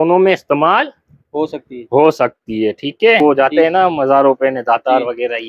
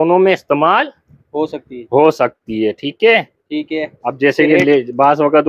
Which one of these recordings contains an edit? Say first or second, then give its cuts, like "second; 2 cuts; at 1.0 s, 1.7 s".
first; 1 cut; at 3.2 s